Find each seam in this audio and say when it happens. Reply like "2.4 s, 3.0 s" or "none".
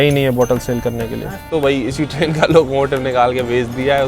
1.5 s